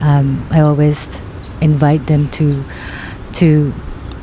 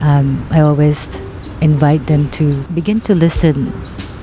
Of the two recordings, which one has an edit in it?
second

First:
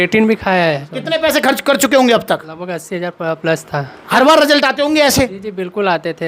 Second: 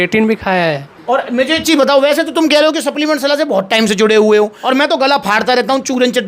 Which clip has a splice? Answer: first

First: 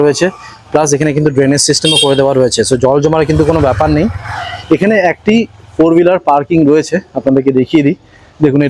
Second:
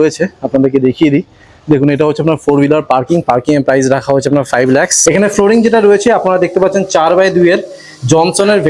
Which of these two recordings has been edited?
second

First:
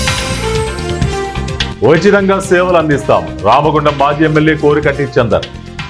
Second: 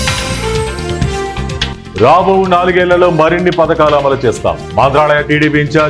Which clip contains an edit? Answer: first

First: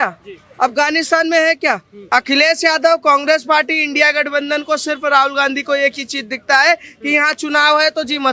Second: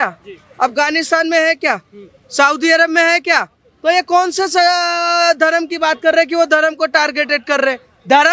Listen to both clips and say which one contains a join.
first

